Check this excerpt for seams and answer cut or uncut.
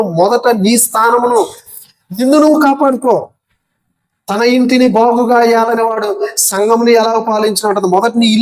uncut